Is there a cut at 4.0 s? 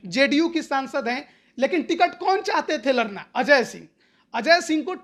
no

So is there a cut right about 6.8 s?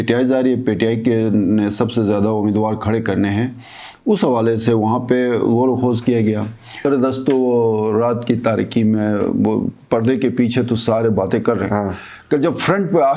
yes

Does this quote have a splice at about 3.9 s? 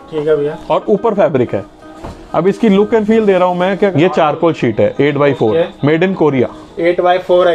yes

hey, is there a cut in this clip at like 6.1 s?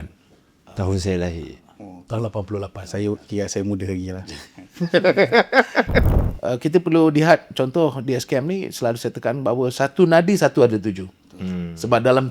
yes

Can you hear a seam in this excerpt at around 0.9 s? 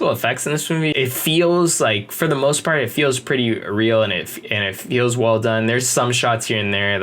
yes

